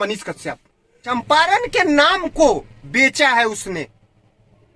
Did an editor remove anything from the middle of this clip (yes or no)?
yes